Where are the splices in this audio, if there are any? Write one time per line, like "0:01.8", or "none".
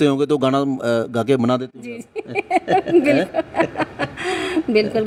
none